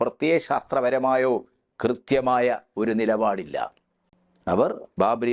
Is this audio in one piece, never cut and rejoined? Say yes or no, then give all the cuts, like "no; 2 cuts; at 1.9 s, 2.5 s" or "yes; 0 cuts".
yes; 0 cuts